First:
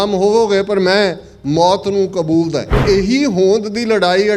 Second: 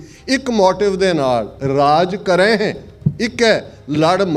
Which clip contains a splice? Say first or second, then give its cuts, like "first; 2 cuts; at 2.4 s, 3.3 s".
first; 1 cut; at 2.8 s